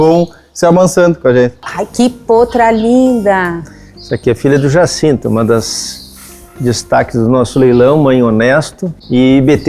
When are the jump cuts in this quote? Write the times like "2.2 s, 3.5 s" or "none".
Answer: 1.7 s